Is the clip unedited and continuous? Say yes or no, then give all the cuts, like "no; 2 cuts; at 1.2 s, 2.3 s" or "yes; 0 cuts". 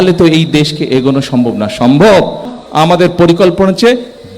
no; 1 cut; at 2.6 s